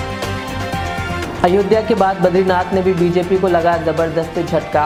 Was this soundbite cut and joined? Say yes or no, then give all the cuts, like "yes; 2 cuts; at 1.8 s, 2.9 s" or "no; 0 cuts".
no; 0 cuts